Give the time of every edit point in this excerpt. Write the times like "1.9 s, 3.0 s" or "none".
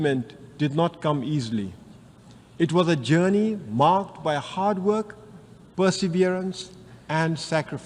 none